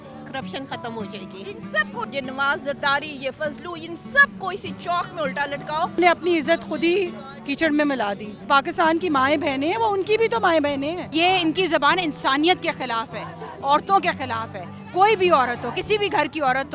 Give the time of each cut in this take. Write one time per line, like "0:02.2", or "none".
0:02.1
0:06.0
0:08.4
0:11.0